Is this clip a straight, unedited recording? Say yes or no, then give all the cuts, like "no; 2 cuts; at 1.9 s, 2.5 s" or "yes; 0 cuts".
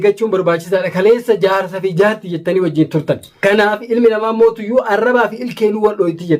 no; 1 cut; at 3.3 s